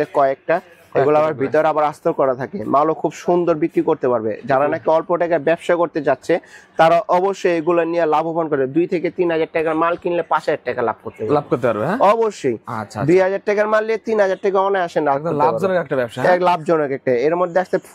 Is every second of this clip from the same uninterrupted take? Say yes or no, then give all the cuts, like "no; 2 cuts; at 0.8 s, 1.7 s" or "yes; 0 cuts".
yes; 0 cuts